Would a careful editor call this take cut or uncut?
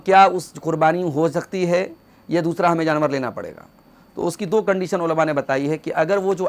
uncut